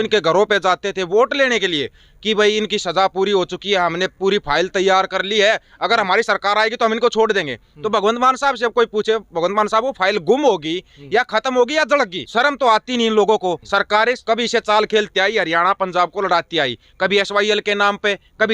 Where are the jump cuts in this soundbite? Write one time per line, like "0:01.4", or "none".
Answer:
0:12.2
0:13.9